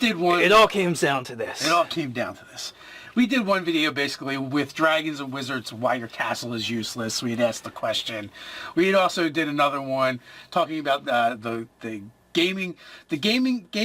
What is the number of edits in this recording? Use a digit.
1